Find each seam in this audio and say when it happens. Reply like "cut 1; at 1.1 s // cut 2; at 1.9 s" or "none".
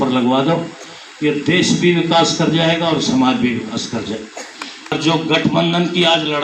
cut 1; at 4.9 s